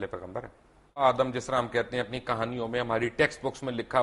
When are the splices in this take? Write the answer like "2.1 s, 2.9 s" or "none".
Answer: 1.0 s